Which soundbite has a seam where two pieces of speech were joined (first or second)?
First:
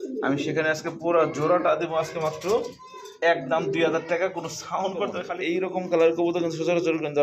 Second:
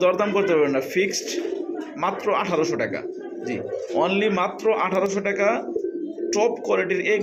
first